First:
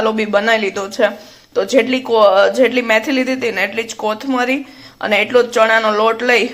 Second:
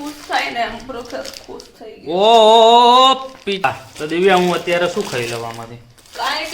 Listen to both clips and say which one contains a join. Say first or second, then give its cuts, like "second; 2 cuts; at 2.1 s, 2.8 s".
second; 1 cut; at 3.6 s